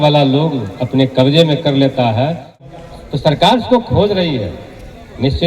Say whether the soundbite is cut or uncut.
cut